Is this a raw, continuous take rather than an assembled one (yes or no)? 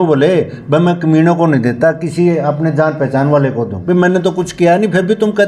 no